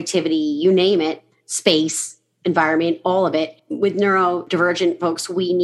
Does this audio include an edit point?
yes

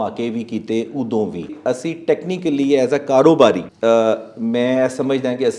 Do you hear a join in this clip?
yes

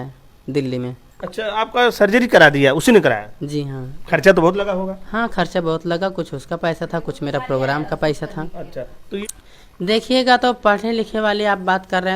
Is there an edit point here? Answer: yes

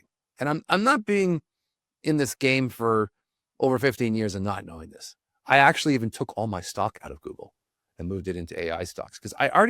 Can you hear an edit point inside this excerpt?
no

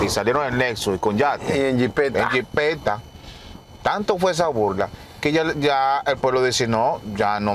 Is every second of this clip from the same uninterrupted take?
yes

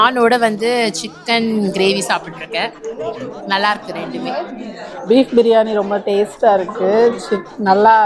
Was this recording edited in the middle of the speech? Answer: yes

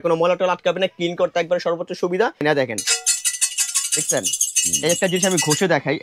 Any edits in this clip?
yes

